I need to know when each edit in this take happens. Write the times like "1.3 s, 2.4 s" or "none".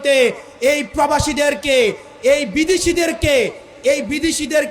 none